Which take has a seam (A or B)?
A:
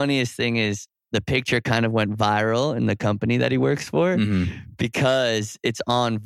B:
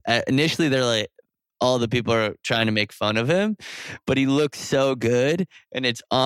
A